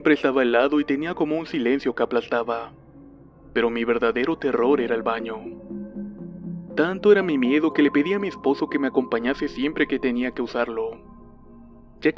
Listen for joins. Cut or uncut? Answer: uncut